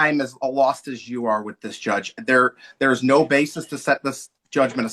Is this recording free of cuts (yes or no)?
yes